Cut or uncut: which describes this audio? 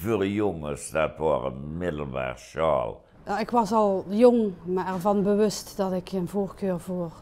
cut